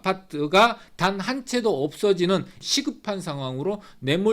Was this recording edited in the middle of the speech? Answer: yes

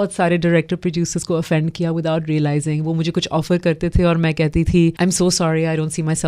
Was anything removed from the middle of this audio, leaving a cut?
yes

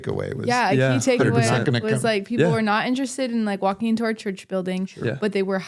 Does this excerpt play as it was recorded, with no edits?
yes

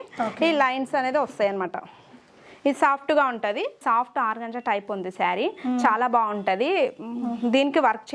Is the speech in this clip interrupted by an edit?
yes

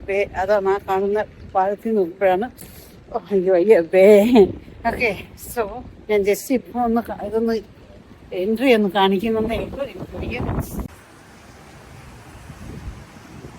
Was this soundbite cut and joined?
yes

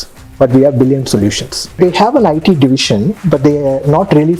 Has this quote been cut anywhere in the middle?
yes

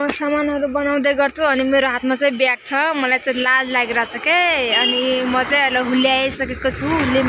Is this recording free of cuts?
yes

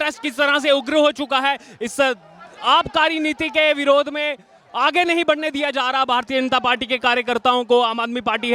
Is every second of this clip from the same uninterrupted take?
yes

